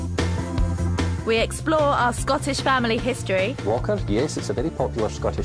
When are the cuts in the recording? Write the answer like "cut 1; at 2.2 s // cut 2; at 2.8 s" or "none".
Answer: cut 1; at 1.2 s